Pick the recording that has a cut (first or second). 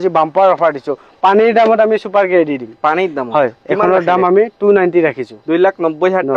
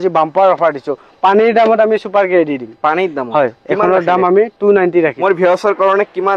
second